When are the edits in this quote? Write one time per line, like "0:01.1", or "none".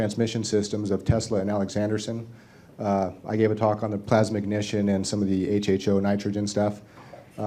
0:02.8